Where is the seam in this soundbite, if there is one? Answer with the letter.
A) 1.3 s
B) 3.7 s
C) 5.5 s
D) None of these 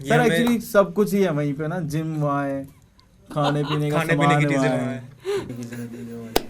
C